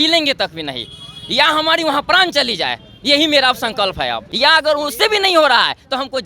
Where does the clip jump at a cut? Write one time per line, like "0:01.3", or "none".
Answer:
0:04.2